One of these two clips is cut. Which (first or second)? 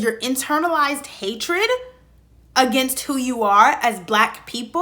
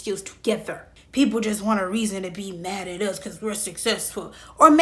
second